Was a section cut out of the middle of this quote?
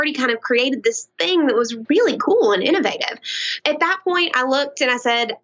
yes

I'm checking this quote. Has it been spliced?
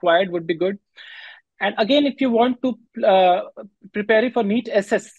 no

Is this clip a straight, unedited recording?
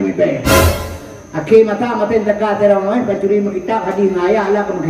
yes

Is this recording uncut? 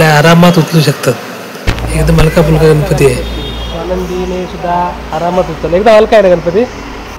no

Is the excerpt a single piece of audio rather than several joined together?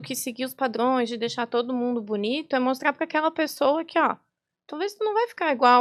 yes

